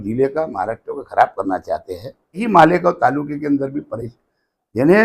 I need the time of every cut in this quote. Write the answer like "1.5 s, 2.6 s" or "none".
2.4 s